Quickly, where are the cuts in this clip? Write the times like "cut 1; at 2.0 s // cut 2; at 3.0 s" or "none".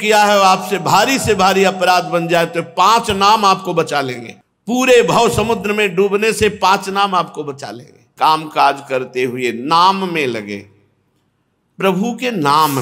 cut 1; at 8.0 s